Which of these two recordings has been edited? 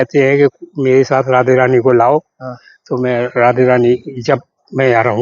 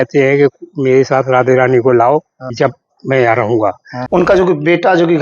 second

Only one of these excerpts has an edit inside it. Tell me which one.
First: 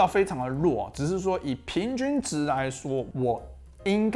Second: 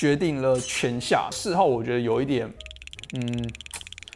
first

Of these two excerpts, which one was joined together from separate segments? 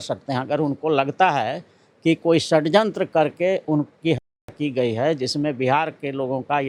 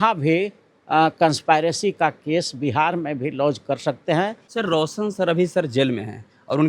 second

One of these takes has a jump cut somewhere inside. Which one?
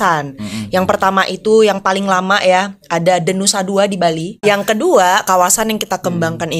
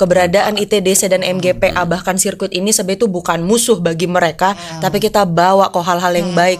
first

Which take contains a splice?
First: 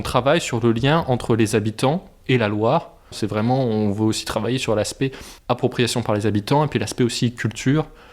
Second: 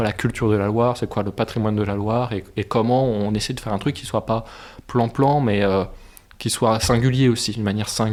first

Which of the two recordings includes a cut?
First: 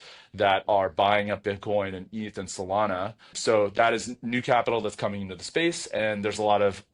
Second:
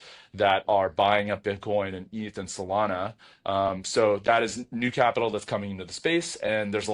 first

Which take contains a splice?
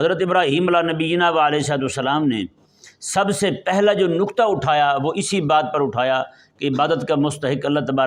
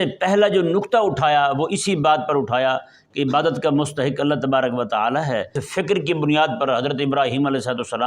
second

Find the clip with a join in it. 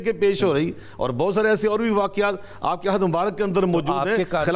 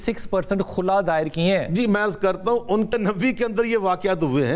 second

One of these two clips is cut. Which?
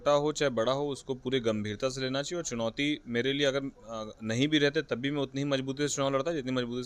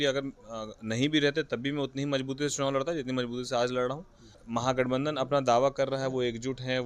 second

